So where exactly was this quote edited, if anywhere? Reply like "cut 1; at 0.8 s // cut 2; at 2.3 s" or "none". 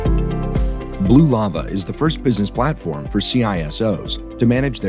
cut 1; at 1.0 s